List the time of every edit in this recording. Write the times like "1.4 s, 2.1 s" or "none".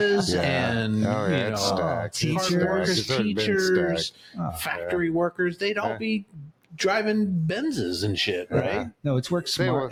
none